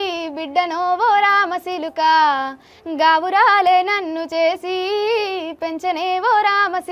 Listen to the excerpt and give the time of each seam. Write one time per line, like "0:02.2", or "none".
none